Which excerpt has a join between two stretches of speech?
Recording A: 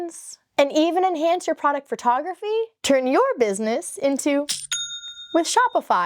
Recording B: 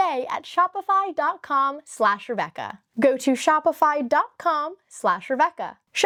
A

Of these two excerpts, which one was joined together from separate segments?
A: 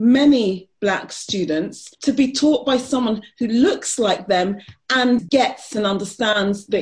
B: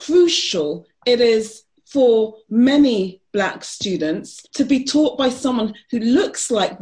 A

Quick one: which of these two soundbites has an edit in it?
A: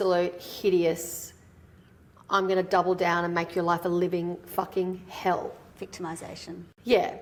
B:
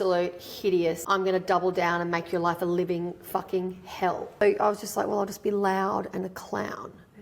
B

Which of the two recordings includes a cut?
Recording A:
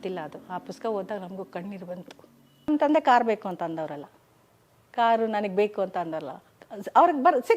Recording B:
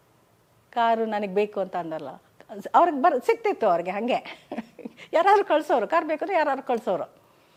A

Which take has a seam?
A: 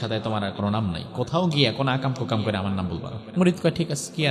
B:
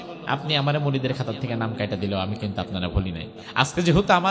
A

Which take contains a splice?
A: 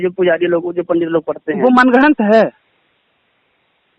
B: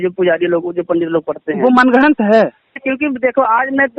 B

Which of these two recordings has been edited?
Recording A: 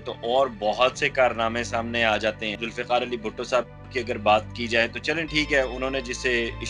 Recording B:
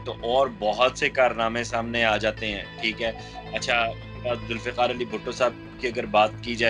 A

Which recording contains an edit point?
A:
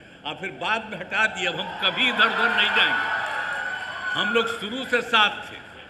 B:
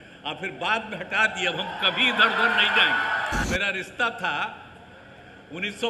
B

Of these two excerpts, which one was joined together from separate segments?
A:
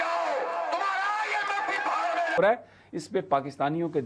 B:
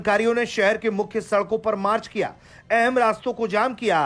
A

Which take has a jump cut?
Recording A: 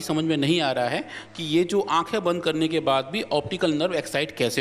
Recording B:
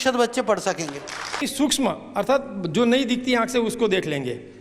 B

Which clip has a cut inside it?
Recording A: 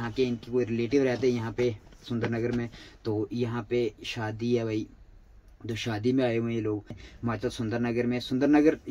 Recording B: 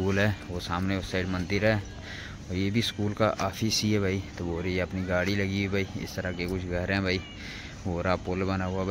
A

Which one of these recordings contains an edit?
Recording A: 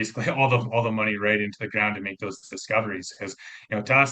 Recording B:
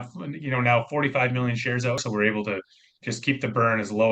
B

